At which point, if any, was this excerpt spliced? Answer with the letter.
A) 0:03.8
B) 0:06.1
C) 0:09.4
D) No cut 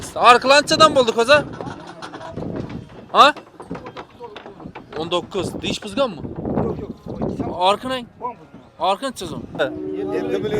C